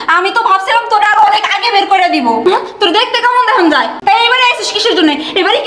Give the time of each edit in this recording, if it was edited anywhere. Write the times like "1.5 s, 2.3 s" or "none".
3.9 s